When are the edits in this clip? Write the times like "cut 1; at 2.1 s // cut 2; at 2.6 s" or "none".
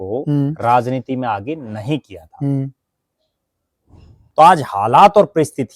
cut 1; at 4.2 s